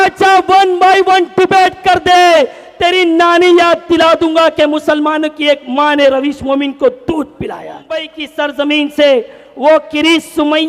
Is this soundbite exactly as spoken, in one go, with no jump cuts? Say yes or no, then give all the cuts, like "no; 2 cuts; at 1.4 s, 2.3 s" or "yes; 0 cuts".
no; 1 cut; at 8.2 s